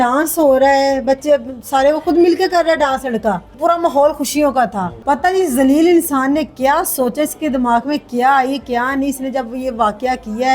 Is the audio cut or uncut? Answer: cut